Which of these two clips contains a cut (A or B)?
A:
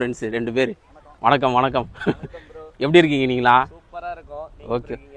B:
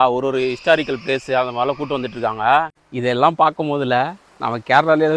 B